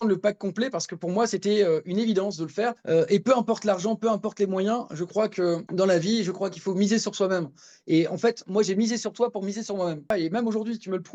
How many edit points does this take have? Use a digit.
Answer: 3